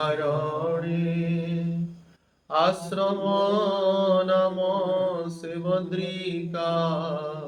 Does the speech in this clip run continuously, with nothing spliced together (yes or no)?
yes